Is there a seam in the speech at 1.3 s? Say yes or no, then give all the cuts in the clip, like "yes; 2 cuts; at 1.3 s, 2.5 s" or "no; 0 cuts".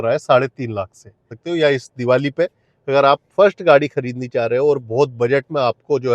yes; 1 cut; at 1.3 s